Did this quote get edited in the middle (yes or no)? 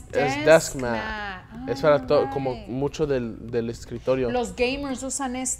no